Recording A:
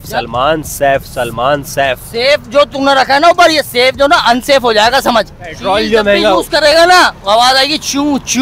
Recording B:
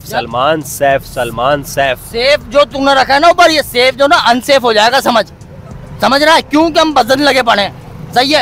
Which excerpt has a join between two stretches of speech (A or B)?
A